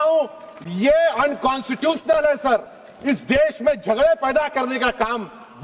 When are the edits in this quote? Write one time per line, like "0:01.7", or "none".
none